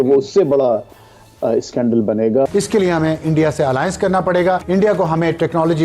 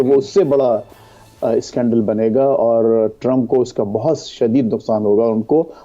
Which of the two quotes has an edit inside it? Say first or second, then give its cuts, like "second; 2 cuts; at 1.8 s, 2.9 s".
first; 2 cuts; at 2.5 s, 4.6 s